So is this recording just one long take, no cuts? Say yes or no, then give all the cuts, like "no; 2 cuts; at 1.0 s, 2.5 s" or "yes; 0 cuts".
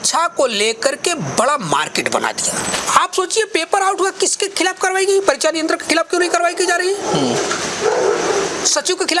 no; 1 cut; at 2.7 s